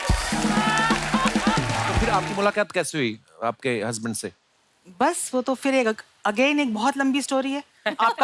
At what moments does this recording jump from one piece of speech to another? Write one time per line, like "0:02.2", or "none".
0:02.0